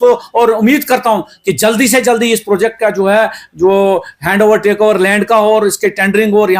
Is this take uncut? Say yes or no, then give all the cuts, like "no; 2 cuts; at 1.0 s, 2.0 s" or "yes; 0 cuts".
yes; 0 cuts